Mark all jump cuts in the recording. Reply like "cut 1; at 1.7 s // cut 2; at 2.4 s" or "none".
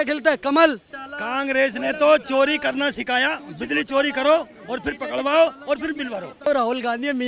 cut 1; at 0.9 s // cut 2; at 6.3 s